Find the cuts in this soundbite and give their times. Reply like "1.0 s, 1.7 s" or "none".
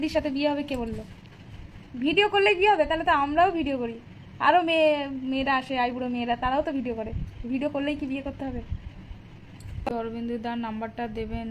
9.9 s

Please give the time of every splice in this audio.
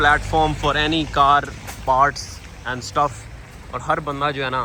none

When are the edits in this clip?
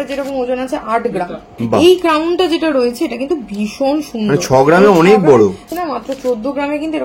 1.5 s, 5.7 s

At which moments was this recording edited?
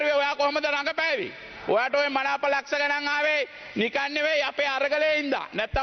none

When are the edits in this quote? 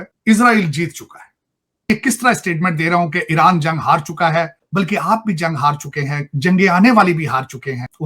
1.9 s

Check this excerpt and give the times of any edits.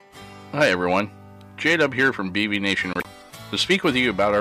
3.0 s

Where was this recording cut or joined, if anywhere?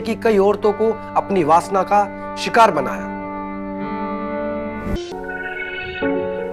5.0 s

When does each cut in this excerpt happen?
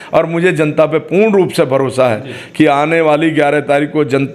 none

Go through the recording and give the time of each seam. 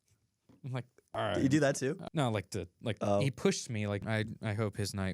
1.0 s, 2.0 s, 4.0 s

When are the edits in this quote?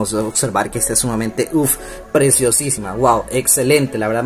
none

